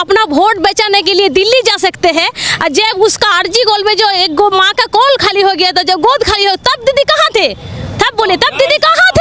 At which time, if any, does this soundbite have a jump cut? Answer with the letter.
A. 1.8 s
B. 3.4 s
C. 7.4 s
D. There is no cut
D